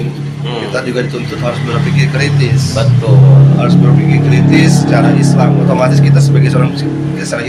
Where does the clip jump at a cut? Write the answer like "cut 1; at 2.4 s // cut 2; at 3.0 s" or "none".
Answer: none